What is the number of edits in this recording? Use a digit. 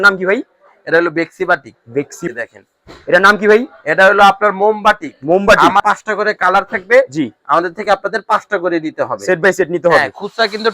2